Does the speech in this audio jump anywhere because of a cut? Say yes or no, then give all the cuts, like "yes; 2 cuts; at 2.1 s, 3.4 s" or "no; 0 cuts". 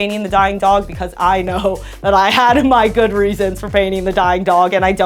no; 0 cuts